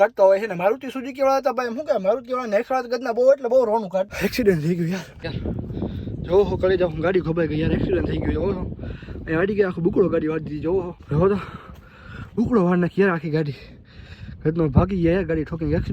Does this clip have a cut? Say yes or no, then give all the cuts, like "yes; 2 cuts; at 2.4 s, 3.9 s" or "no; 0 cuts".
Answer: yes; 3 cuts; at 4.1 s, 5.2 s, 11.0 s